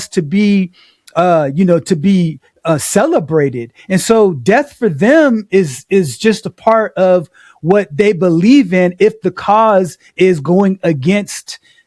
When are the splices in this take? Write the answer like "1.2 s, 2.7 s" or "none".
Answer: none